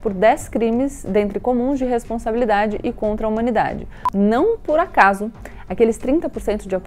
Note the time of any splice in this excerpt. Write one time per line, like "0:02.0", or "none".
0:04.0